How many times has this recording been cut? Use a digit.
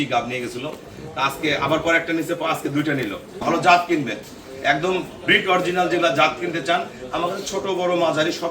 1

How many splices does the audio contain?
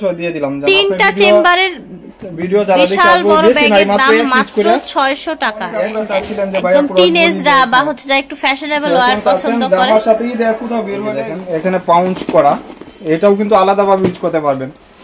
2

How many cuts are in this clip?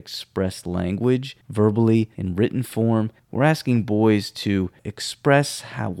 3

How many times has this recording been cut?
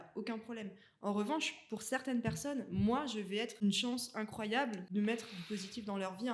2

